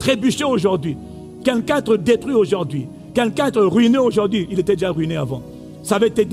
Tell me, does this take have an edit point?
no; 0 cuts

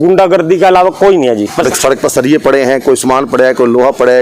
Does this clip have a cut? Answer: yes; 1 cut; at 1.7 s

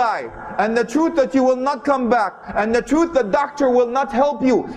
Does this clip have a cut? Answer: no; 0 cuts

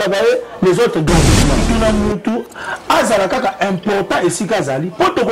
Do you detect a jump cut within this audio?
yes; 1 cut; at 1.6 s

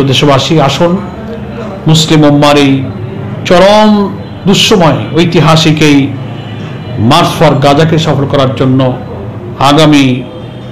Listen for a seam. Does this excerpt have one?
no; 0 cuts

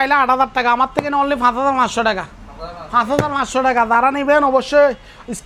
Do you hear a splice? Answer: no; 0 cuts

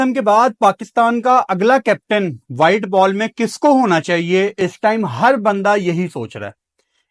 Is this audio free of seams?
yes; 0 cuts

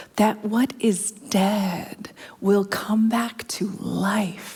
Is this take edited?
no; 0 cuts

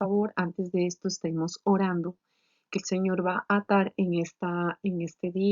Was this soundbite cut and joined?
yes; 1 cut; at 1.3 s

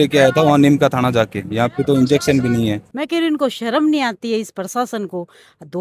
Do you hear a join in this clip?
yes; 1 cut; at 2.9 s

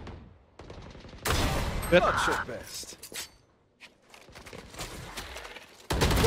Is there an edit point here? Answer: no; 0 cuts

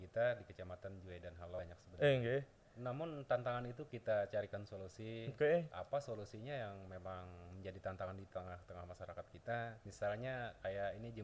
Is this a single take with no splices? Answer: no; 2 cuts; at 1.6 s, 9.8 s

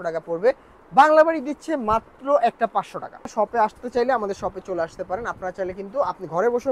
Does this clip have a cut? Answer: yes; 1 cut; at 3.3 s

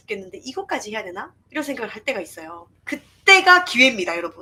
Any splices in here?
no; 0 cuts

